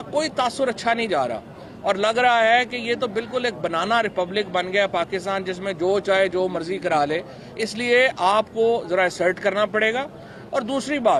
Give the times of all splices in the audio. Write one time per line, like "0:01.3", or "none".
none